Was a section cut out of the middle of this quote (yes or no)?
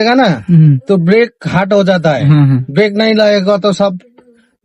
no